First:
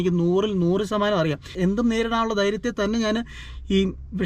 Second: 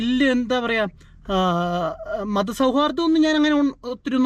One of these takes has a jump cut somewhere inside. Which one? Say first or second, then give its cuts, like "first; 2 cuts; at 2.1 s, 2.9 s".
first; 1 cut; at 1.5 s